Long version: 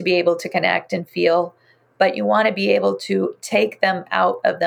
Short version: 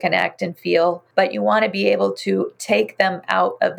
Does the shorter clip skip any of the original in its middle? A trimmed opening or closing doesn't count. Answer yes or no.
yes